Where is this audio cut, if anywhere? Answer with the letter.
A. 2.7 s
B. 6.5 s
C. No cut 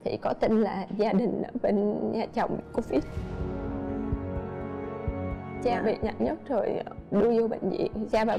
C